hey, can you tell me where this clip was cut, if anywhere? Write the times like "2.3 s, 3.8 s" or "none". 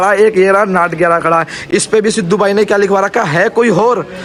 none